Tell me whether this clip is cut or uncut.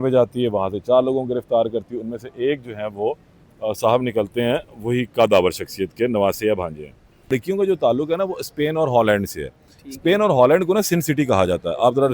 cut